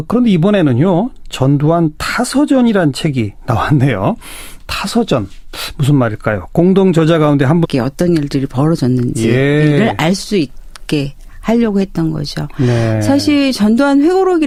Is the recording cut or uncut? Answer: uncut